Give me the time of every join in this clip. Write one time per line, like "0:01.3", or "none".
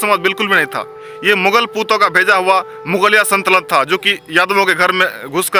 none